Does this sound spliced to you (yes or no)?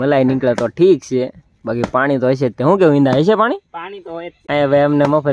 yes